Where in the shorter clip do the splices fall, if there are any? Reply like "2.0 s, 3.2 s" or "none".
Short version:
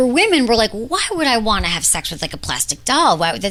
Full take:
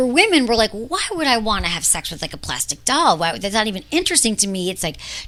none